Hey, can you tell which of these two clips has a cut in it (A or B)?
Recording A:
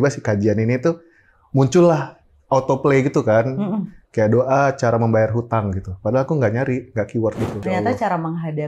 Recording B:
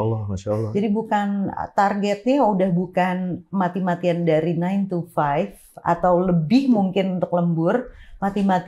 A